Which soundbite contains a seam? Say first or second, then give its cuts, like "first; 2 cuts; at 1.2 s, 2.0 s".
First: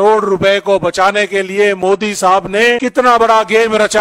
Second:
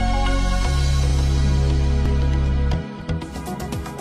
first; 1 cut; at 2.8 s